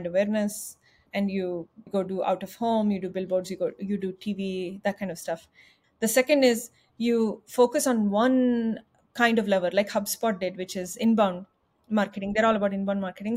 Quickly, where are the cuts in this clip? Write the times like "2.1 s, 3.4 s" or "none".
5.7 s